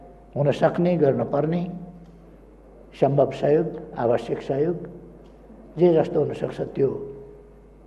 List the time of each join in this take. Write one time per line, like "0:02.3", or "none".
none